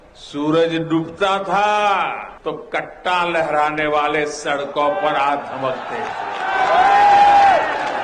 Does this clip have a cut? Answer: yes; 1 cut; at 2.3 s

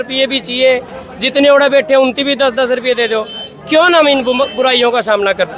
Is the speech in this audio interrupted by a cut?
no; 0 cuts

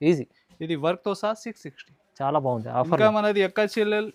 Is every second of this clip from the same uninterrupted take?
yes; 0 cuts

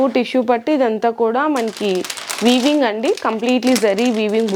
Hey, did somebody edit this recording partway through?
no; 0 cuts

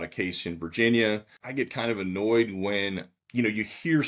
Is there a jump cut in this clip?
yes; 2 cuts; at 1.4 s, 3.2 s

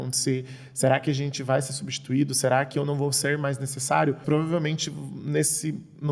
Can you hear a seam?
yes; 1 cut; at 4.2 s

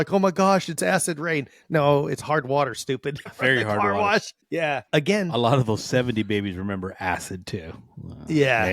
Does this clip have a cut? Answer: yes; 1 cut; at 4.8 s

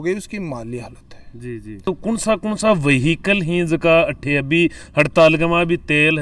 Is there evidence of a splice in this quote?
yes; 1 cut; at 1.8 s

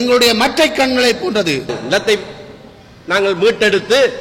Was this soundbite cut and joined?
yes; 1 cut; at 1.8 s

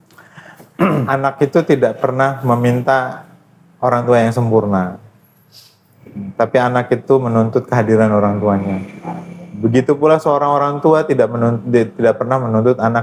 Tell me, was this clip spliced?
no; 0 cuts

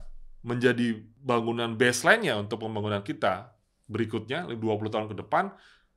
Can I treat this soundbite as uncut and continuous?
no; 1 cut; at 1.1 s

